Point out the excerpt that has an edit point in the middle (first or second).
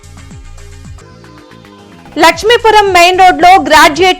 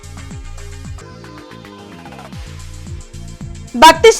first